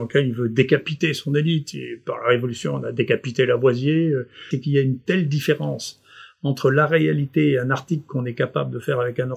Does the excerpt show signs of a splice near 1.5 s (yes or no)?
no